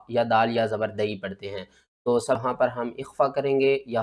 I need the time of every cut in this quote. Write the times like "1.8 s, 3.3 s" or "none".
2.4 s